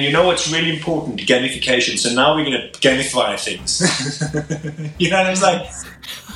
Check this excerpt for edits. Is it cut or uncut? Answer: uncut